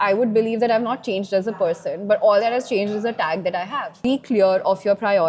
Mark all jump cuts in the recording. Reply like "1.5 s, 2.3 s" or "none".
4.0 s